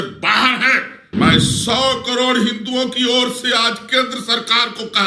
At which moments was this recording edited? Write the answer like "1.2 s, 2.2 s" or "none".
1.0 s